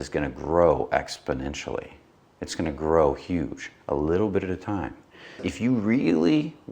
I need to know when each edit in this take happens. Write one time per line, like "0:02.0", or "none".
0:05.4